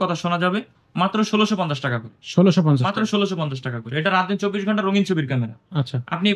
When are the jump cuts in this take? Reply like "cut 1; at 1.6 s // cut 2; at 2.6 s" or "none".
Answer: none